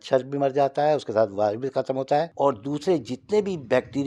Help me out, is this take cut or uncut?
cut